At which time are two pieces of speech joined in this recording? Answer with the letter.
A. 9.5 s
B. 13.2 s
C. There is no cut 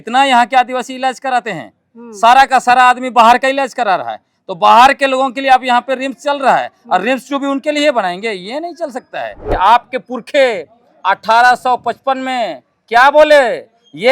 A